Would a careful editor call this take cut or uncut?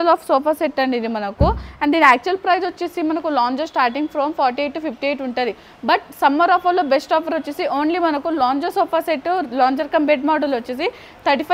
uncut